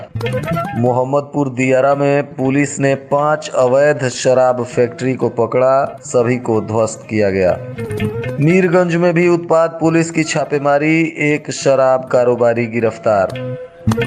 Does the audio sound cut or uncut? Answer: uncut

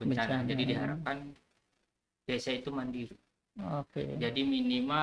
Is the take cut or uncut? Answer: uncut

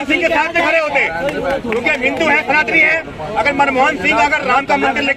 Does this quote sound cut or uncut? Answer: uncut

